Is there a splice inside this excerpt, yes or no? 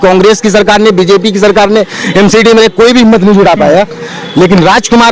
no